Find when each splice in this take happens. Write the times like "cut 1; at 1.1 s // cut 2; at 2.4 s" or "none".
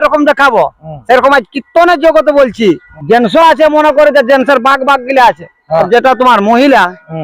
cut 1; at 2.9 s // cut 2; at 5.9 s